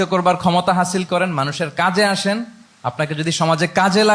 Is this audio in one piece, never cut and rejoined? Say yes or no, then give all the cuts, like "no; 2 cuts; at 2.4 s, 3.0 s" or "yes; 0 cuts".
yes; 0 cuts